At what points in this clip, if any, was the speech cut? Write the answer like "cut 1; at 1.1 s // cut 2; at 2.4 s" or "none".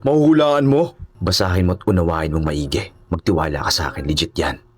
cut 1; at 1.1 s